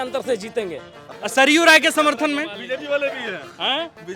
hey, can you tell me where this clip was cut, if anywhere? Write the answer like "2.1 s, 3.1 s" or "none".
1.0 s